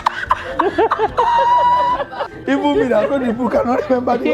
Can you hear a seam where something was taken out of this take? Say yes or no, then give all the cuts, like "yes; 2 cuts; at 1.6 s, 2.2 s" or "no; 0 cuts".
yes; 1 cut; at 2.2 s